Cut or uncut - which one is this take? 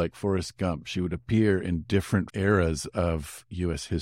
uncut